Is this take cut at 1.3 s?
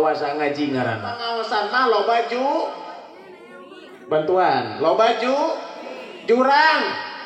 yes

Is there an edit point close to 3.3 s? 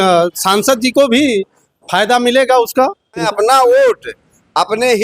yes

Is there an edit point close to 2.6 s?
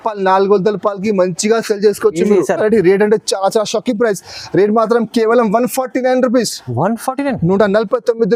yes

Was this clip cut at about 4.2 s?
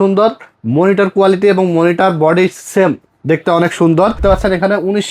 yes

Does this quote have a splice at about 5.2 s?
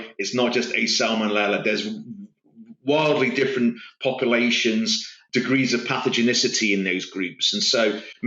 yes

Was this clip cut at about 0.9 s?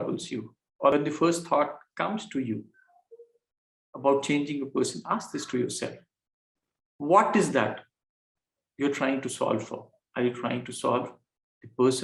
yes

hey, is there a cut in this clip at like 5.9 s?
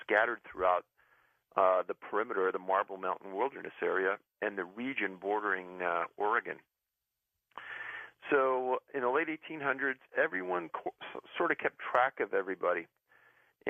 no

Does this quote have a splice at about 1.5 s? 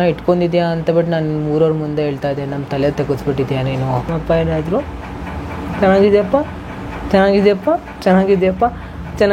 no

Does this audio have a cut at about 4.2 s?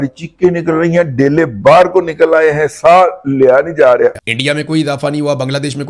yes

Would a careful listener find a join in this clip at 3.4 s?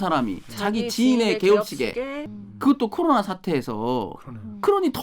no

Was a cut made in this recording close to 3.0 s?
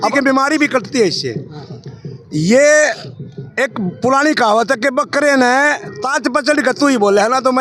no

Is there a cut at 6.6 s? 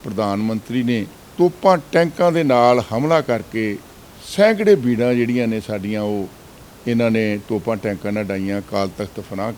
no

